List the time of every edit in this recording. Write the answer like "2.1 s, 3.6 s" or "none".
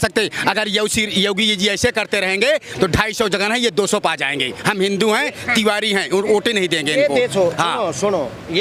none